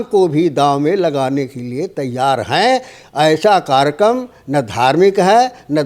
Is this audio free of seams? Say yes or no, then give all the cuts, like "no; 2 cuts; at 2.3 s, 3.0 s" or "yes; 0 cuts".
yes; 0 cuts